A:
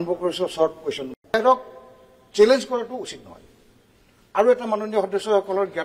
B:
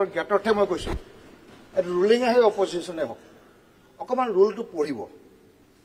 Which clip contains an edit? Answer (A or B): A